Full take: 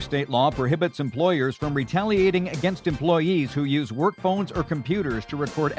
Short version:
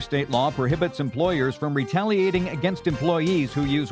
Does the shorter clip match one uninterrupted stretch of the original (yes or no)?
yes